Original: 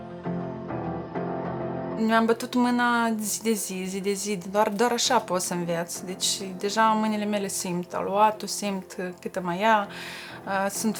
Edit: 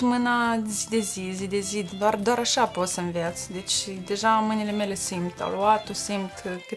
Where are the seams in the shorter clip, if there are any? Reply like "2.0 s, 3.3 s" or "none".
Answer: none